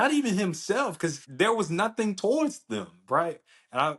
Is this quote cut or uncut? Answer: cut